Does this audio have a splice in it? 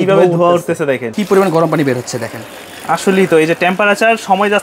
yes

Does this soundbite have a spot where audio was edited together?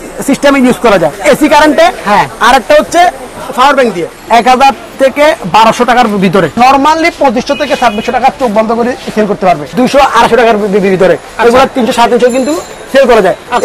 yes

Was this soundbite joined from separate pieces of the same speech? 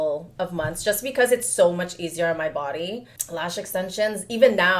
yes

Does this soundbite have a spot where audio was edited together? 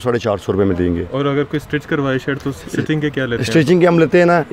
no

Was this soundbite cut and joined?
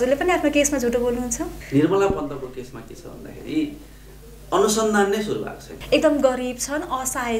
yes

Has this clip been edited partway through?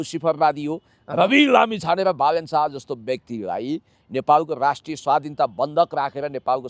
no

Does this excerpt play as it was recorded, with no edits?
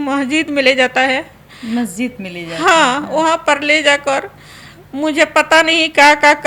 yes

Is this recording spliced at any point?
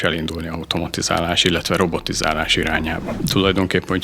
yes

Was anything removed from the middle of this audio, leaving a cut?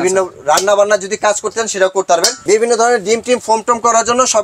yes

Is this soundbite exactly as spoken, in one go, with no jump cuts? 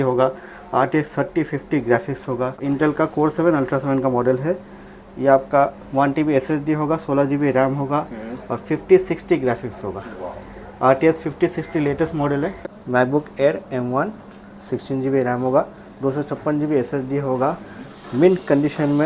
no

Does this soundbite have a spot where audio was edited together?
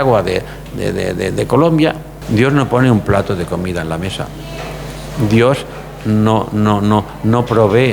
yes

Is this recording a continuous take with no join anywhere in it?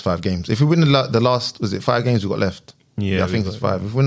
yes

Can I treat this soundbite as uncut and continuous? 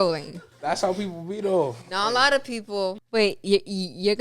no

